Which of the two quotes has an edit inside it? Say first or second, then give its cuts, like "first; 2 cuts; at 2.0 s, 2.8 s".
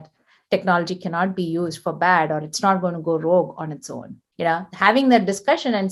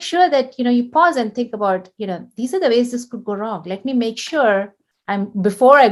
first; 1 cut; at 4.2 s